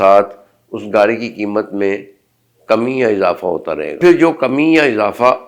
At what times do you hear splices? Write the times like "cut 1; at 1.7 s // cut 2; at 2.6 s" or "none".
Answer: cut 1; at 4.0 s